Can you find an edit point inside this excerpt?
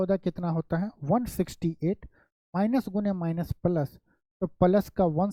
no; 0 cuts

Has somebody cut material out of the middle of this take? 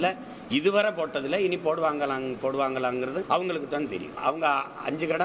yes; 2 cuts; at 3.2 s, 4.1 s

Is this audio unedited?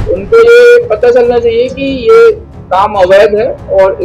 yes; 0 cuts

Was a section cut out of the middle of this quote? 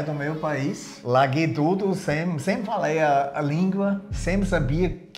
yes; 1 cut; at 4.1 s

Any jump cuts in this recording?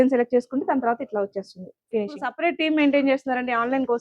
yes; 1 cut; at 2.3 s

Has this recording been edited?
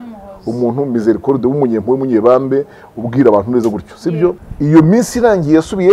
yes; 1 cut; at 4.5 s

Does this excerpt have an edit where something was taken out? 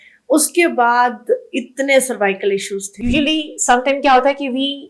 yes; 1 cut; at 2.8 s

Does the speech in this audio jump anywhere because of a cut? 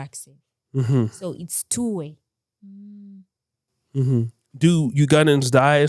no; 0 cuts

